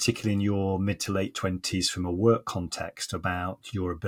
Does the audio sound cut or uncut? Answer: uncut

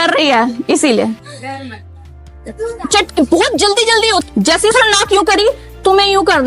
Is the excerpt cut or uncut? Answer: cut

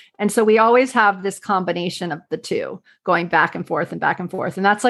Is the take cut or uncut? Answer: uncut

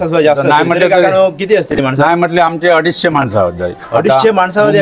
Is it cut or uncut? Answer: uncut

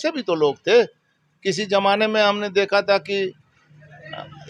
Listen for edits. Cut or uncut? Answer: uncut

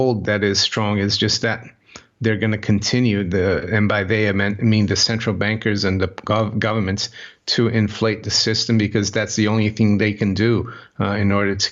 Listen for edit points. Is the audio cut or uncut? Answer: uncut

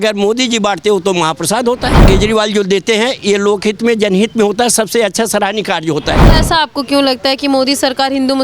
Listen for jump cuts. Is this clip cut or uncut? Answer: cut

